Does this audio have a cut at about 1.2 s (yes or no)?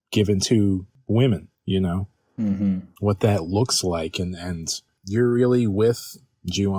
yes